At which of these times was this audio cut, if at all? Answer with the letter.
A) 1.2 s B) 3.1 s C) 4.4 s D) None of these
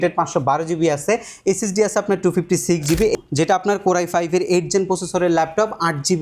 B